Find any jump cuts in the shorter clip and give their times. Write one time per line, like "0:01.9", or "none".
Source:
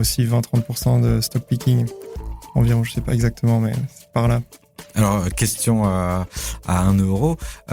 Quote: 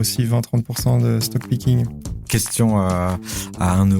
0:02.3

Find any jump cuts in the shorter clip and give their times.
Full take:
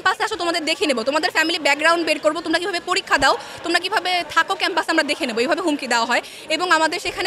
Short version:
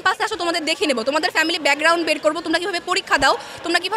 none

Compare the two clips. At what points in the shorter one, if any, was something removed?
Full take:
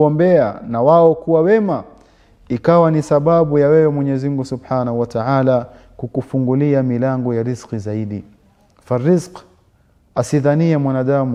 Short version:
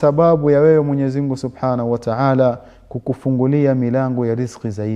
none

